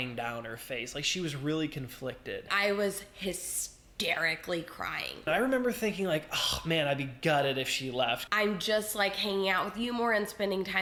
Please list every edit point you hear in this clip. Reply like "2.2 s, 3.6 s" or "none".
none